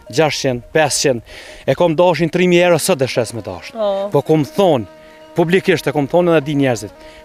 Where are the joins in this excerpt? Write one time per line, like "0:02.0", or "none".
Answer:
none

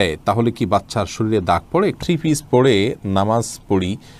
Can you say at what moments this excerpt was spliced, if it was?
0:02.0

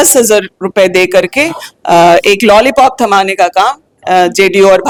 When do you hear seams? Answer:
none

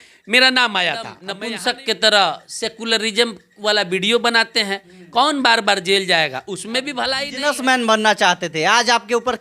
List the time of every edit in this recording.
0:01.2
0:07.2

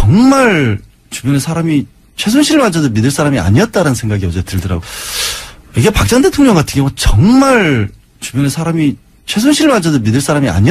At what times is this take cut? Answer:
0:04.8

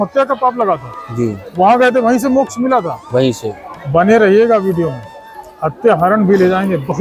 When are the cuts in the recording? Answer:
none

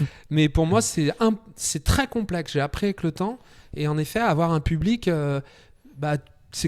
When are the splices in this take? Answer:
none

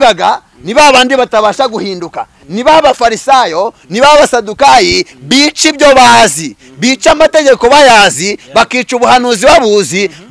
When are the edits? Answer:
none

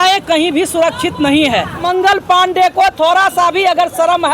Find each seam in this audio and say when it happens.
0:01.8

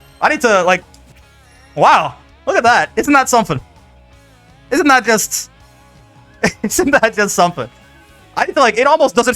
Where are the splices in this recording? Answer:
none

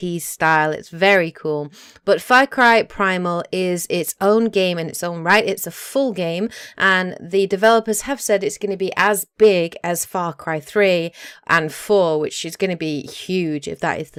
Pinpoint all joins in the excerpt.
none

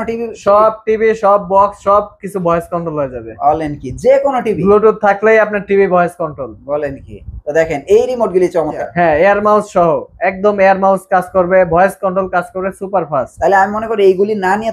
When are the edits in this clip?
0:08.8

